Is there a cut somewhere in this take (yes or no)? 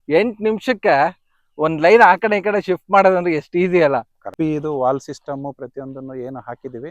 yes